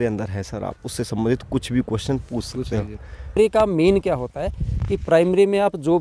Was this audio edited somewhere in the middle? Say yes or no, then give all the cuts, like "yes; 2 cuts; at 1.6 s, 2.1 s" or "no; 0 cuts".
yes; 1 cut; at 3.4 s